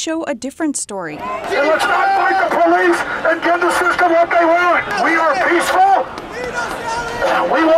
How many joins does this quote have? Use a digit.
2